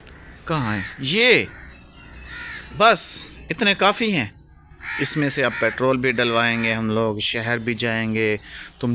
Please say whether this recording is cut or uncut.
uncut